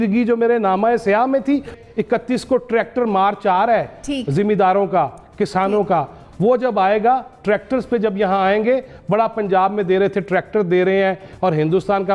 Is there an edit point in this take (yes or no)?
yes